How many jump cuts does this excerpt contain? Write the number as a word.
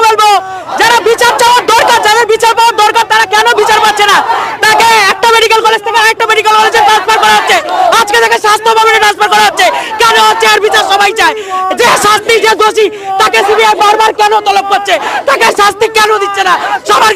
zero